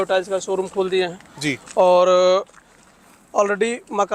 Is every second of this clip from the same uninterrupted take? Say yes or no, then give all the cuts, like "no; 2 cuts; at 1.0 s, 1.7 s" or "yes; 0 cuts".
yes; 0 cuts